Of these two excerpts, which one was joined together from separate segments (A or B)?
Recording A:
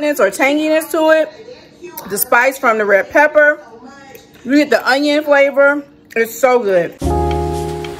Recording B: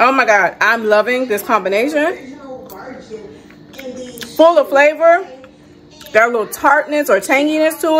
A